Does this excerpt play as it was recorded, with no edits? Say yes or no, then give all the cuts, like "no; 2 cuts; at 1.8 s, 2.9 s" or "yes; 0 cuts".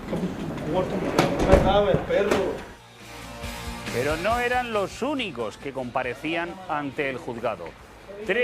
yes; 0 cuts